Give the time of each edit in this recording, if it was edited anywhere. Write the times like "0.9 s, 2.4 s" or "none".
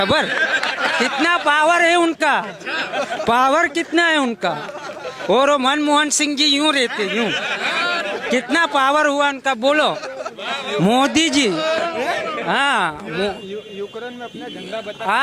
none